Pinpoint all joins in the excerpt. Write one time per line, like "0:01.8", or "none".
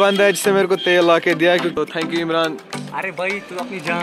0:01.7